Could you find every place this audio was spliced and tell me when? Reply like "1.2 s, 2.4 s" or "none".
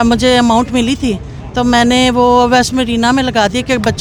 none